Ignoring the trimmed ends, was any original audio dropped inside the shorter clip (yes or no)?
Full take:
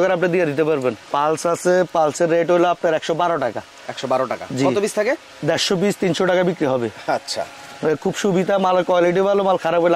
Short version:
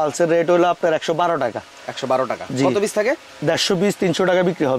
no